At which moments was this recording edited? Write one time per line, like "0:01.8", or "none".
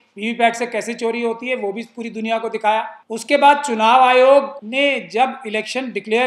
0:03.0
0:04.6